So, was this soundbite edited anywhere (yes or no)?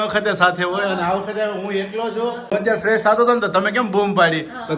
yes